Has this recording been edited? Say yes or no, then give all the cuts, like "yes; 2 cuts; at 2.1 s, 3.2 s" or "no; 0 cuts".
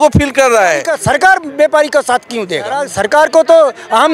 yes; 2 cuts; at 0.9 s, 2.9 s